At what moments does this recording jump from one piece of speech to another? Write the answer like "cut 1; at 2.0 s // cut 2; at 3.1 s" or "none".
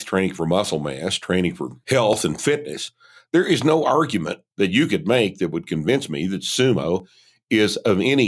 cut 1; at 1.7 s